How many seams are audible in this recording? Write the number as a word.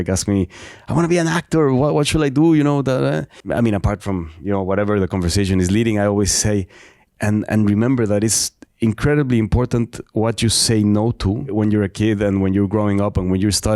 two